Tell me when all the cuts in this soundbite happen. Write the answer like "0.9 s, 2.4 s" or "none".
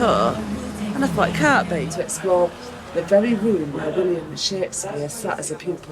1.9 s